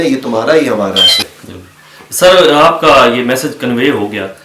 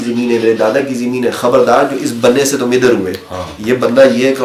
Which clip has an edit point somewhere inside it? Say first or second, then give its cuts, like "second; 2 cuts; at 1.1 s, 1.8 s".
first; 1 cut; at 1.2 s